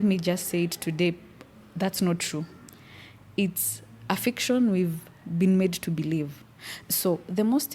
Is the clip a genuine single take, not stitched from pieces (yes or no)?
yes